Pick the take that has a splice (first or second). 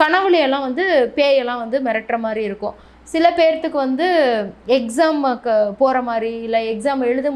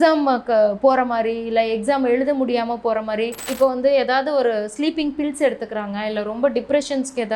second